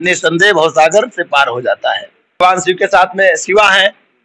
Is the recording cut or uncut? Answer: cut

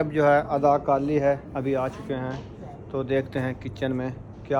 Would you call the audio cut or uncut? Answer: uncut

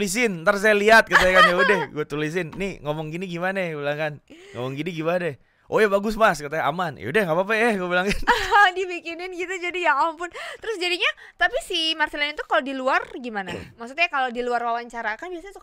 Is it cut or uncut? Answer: uncut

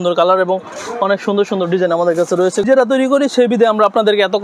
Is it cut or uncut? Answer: cut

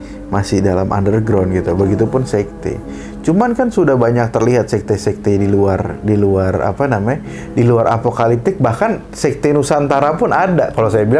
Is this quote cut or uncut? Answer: uncut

